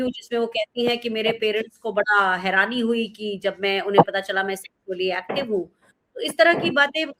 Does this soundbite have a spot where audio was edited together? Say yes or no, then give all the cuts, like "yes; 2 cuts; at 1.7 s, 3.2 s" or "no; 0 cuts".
no; 0 cuts